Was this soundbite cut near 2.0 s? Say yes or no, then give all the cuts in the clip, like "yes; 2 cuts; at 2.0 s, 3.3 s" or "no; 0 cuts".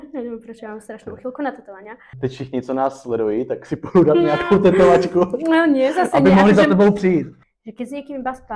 yes; 2 cuts; at 2.0 s, 7.4 s